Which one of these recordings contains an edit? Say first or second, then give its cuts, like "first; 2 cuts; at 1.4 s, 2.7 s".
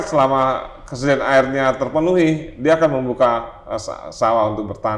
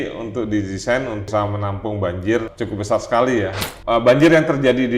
second; 3 cuts; at 1.3 s, 2.5 s, 3.7 s